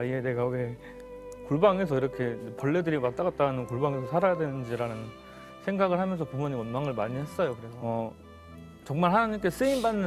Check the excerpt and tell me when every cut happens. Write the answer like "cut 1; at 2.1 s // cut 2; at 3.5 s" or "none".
cut 1; at 7.7 s